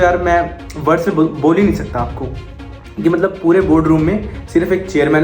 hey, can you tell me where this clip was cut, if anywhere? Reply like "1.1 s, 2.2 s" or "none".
none